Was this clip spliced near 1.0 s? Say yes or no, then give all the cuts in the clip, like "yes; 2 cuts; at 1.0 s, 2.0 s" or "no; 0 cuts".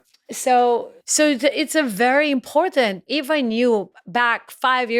yes; 2 cuts; at 1.0 s, 3.0 s